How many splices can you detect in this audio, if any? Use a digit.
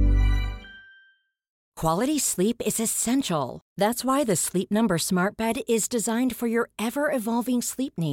1